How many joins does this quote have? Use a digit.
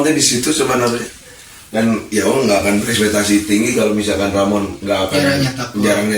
0